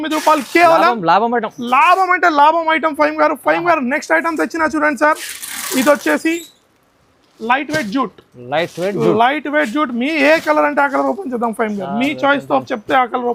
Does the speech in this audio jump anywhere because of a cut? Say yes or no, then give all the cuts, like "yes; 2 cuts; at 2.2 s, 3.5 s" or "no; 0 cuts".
no; 0 cuts